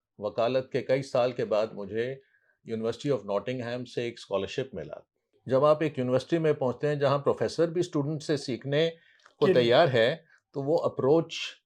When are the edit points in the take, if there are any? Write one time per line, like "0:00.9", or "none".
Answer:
0:05.3